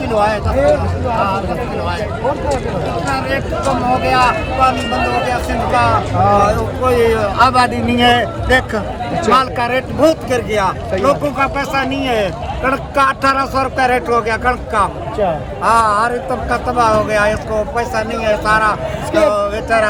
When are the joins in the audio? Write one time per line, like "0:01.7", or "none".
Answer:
none